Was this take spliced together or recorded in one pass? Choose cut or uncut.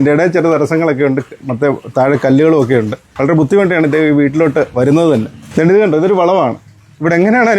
uncut